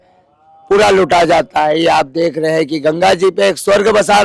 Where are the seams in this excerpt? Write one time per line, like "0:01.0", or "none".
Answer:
none